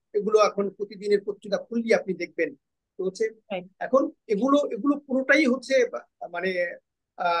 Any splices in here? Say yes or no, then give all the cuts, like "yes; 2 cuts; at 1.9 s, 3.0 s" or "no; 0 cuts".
no; 0 cuts